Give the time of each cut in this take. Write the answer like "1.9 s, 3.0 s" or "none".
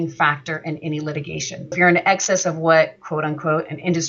1.7 s